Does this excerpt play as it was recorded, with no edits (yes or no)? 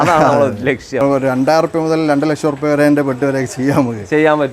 no